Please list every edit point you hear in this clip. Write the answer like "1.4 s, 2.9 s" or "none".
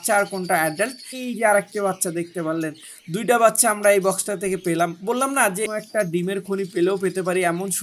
1.1 s, 5.7 s